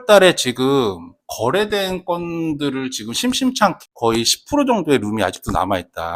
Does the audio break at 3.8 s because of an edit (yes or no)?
yes